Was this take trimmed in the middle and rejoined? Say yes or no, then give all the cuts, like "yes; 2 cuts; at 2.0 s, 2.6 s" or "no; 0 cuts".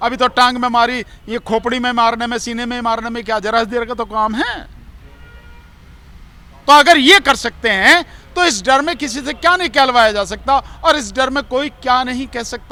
no; 0 cuts